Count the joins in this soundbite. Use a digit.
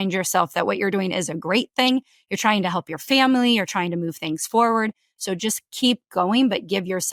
0